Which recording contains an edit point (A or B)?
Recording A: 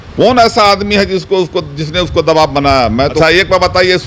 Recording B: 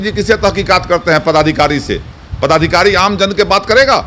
A